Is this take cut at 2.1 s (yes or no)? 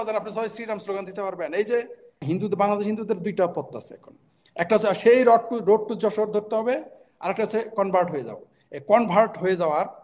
yes